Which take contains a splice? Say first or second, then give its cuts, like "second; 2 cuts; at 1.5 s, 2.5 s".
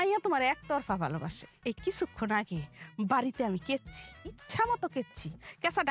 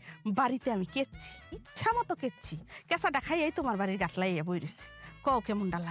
first; 1 cut; at 1.4 s